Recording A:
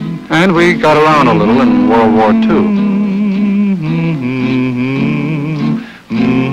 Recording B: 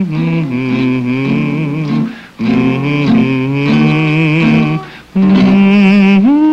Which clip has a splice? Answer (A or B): A